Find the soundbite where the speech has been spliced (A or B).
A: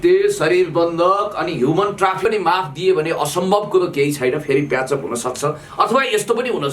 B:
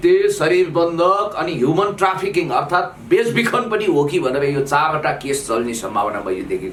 A